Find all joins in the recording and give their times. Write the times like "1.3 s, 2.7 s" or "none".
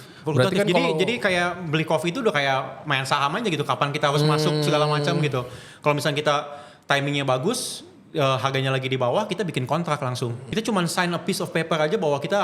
10.5 s